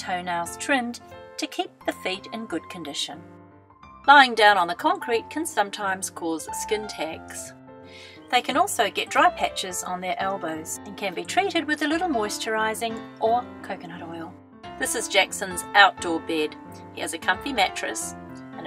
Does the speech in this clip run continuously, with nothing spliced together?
no; 1 cut; at 2.3 s

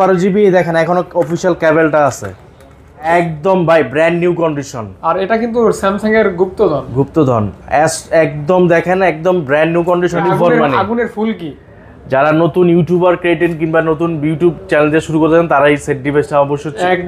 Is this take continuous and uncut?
no; 2 cuts; at 3.1 s, 10.2 s

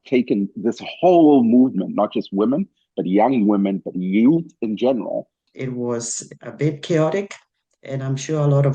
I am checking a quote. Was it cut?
yes; 1 cut; at 5.4 s

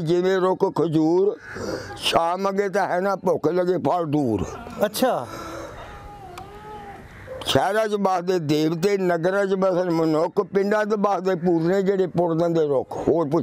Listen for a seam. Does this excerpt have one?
no; 0 cuts

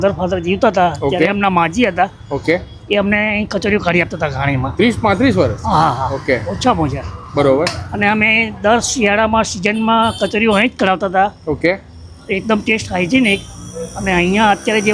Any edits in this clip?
no; 0 cuts

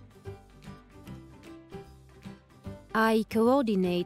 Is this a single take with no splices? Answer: no; 1 cut; at 2.9 s

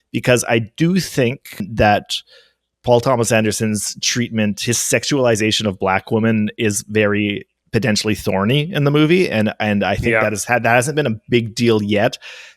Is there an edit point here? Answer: yes; 2 cuts; at 1.7 s, 7.5 s

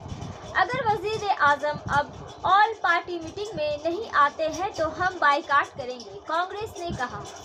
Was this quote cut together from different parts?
no; 0 cuts

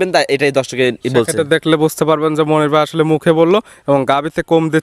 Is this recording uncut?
yes; 0 cuts

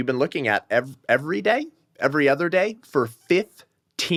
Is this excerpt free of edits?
yes; 0 cuts

